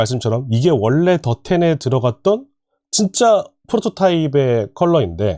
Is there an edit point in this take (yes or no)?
no